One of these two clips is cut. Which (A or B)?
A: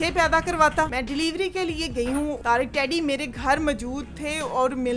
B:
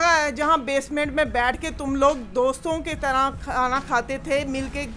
A